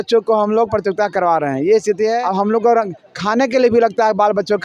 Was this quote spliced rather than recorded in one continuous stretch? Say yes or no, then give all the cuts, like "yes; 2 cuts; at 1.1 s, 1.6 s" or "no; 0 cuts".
yes; 1 cut; at 2.2 s